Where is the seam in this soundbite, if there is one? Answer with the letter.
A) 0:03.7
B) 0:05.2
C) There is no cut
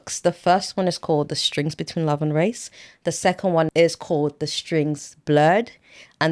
A